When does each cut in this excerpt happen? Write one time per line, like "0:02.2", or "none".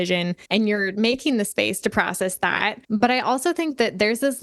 0:00.7
0:02.8